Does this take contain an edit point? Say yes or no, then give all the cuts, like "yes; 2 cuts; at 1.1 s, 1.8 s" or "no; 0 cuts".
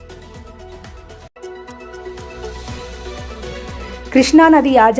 yes; 2 cuts; at 1.2 s, 4.1 s